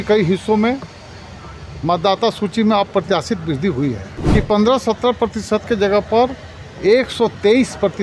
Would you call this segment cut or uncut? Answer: cut